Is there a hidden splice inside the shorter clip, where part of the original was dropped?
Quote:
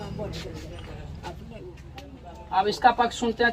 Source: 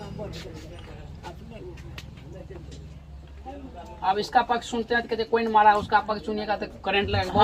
yes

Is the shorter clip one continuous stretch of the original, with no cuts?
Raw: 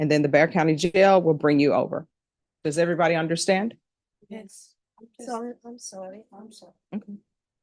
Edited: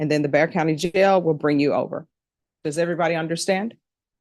yes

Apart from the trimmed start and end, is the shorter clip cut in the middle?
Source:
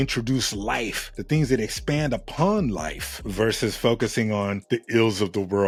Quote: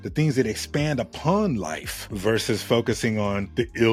no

